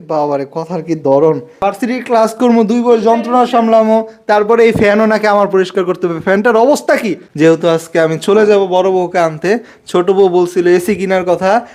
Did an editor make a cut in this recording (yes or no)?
yes